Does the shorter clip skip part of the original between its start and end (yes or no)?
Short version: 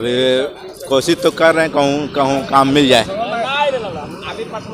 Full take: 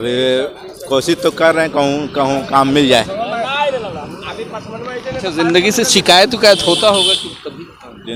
no